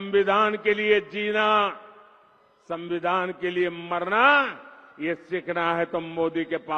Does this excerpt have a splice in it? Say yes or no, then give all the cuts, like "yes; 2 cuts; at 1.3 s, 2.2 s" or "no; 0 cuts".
no; 0 cuts